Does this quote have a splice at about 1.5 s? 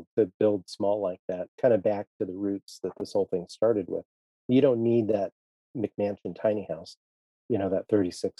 yes; 1 cut; at 1.5 s

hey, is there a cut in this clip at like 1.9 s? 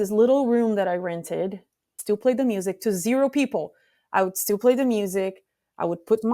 yes; 1 cut; at 1.9 s

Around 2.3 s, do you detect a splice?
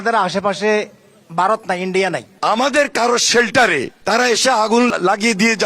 yes; 3 cuts; at 2.3 s, 3.9 s, 4.9 s

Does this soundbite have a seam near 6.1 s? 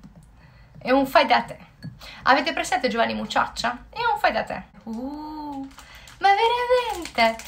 no; 1 cut; at 4.8 s

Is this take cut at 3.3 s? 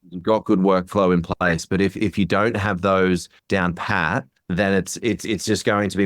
yes; 2 cuts; at 3.3 s, 4.3 s

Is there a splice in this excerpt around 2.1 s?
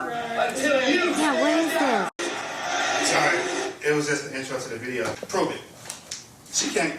yes; 2 cuts; at 2.1 s, 5.2 s

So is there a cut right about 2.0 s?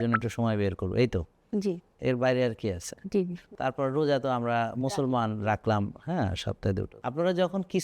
no; 2 cuts; at 3.4 s, 6.9 s

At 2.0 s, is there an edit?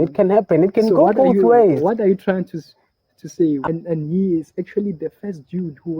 no; 1 cut; at 3.6 s

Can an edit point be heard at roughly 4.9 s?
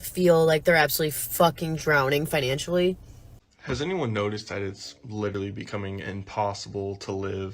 no; 1 cut; at 3.1 s

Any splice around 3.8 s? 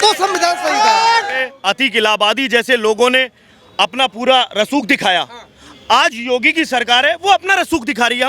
no; 1 cut; at 1.4 s

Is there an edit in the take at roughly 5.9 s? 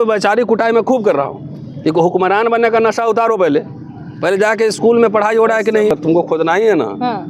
yes; 1 cut; at 5.9 s

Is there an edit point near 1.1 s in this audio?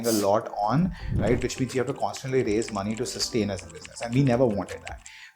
yes; 1 cut; at 1.1 s

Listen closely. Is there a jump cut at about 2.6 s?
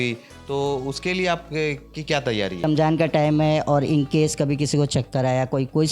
yes; 1 cut; at 2.6 s

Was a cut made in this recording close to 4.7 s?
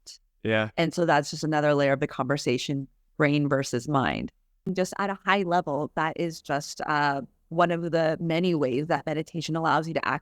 yes; 1 cut; at 4.7 s

